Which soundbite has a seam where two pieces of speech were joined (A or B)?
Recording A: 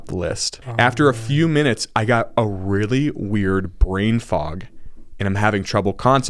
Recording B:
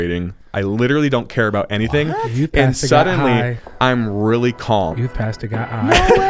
B